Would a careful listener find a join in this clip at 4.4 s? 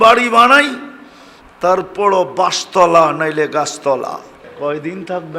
yes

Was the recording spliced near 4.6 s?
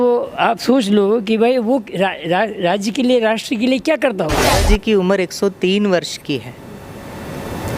yes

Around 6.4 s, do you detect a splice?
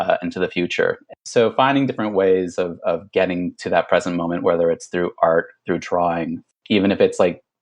yes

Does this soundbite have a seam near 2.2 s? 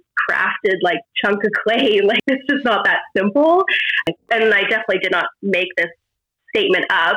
yes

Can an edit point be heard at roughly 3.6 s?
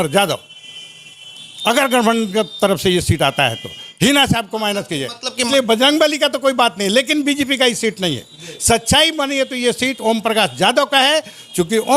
no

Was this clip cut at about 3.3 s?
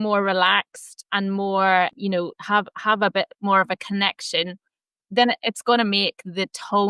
no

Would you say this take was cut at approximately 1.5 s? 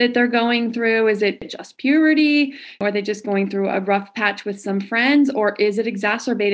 yes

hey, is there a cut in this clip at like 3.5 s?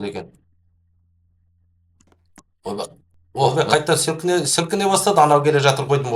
yes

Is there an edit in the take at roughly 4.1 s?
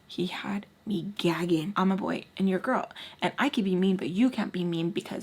no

